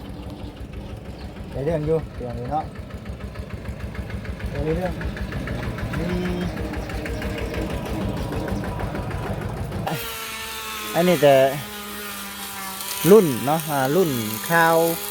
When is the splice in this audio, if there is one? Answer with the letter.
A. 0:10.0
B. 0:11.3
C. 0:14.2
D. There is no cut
A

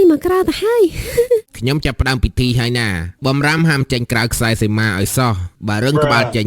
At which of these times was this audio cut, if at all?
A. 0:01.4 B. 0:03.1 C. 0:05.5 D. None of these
A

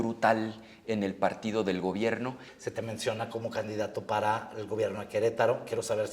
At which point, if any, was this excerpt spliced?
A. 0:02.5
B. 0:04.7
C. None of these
A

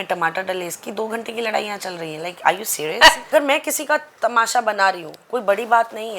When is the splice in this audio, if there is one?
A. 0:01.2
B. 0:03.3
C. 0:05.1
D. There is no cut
B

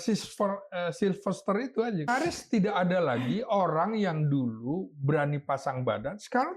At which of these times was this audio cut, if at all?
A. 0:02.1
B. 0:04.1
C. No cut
A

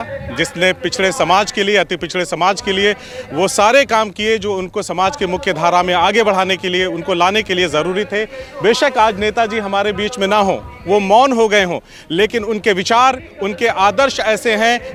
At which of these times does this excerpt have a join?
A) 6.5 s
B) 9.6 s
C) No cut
C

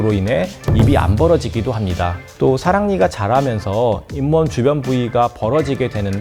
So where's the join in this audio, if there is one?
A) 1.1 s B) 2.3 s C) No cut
C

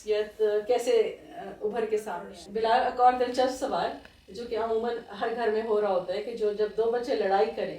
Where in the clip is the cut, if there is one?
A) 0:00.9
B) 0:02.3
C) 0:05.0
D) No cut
B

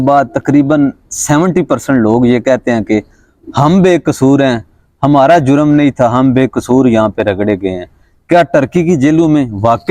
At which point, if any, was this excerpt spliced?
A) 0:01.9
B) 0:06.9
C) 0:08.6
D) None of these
D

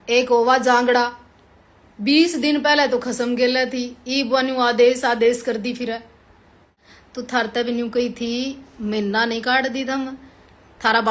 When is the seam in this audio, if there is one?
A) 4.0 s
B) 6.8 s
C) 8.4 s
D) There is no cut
B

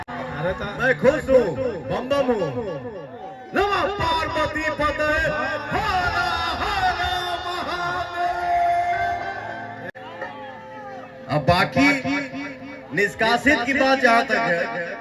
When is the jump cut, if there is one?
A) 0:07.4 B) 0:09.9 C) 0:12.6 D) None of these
B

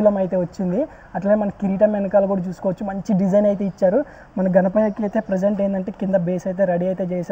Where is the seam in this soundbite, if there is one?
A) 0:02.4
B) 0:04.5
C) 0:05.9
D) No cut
D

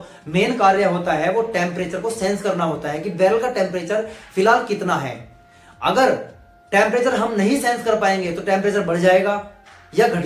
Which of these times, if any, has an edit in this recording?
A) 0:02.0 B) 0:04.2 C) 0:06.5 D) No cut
D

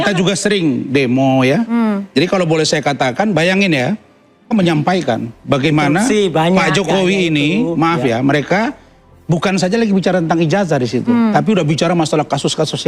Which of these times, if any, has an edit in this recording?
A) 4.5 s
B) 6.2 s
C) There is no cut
A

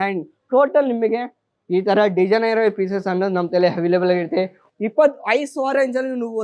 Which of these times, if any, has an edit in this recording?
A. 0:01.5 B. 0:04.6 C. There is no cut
B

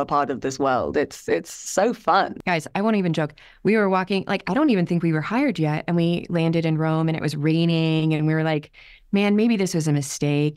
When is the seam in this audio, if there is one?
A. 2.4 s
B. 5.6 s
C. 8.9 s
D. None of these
A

